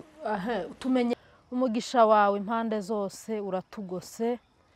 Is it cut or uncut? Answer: cut